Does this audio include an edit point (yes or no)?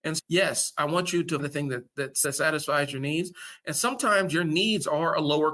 yes